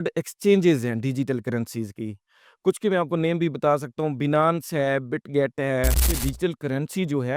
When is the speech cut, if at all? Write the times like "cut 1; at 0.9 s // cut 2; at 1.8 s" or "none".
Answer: cut 1; at 6.1 s